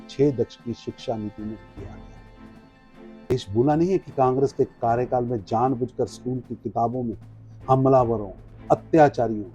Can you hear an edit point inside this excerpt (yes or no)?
yes